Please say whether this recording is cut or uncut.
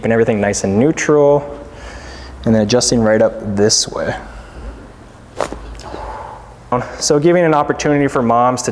cut